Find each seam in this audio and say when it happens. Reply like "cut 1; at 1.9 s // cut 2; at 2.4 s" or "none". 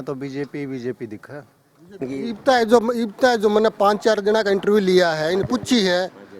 cut 1; at 2.0 s